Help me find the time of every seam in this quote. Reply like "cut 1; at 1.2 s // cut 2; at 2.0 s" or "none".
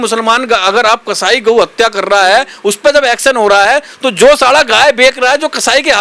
none